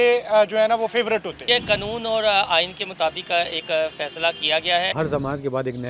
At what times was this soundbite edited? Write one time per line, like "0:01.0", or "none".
0:01.4
0:04.9